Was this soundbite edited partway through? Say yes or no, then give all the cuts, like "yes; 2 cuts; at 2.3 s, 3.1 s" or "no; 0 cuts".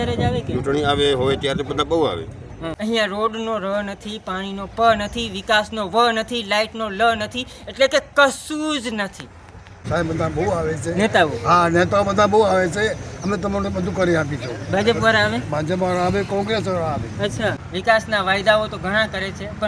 yes; 3 cuts; at 2.6 s, 9.7 s, 17.5 s